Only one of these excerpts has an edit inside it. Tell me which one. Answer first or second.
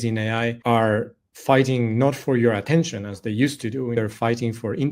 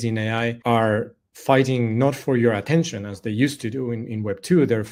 first